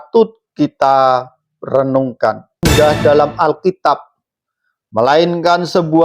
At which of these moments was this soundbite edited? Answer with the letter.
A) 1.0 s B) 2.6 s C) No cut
B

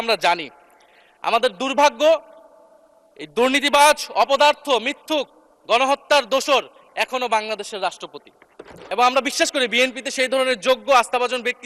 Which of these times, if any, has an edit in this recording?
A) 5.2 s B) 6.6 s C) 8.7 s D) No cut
C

